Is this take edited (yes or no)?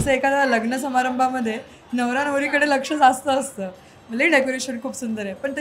no